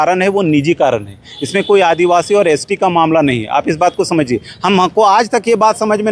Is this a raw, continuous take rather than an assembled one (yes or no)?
yes